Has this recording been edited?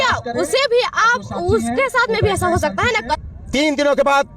yes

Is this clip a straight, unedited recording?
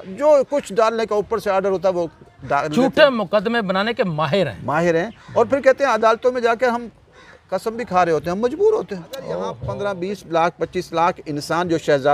no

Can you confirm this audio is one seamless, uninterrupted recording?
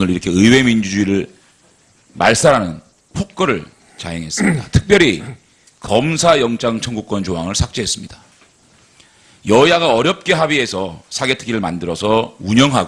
no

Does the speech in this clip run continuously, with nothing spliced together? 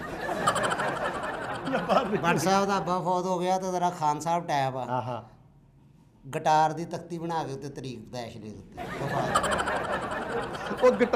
no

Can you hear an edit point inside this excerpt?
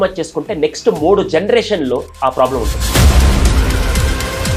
no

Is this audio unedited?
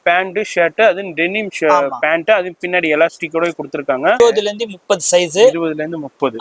no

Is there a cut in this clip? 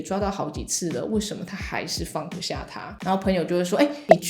yes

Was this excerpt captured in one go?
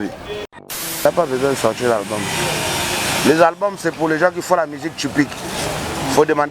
no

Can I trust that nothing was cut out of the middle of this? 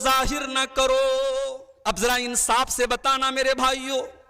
no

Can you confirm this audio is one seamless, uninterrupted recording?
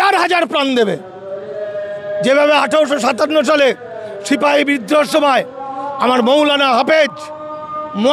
yes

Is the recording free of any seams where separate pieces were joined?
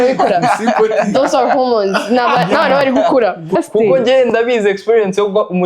no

